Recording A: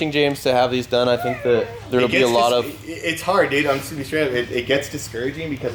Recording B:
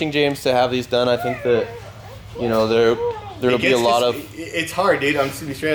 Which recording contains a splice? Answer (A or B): A